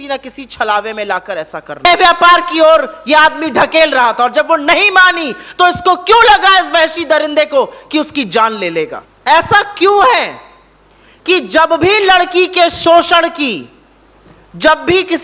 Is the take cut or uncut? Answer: cut